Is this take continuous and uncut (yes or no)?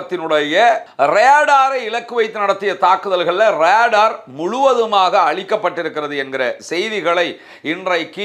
yes